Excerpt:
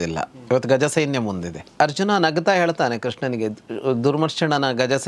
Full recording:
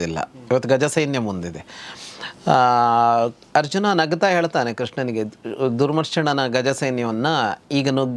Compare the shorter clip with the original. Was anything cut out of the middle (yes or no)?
yes